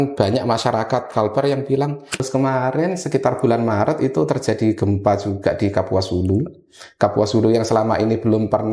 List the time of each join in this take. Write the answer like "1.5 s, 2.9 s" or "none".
2.2 s